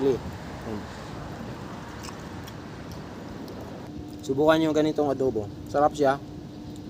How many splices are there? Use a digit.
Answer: 1